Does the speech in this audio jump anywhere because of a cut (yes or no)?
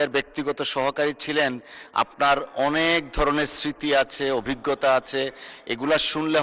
no